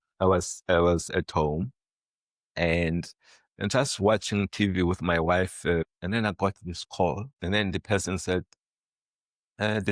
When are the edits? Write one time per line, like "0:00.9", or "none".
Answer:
0:05.9
0:07.3